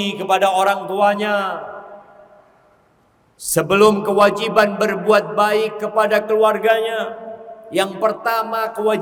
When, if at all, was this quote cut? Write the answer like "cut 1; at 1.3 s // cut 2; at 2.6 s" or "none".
none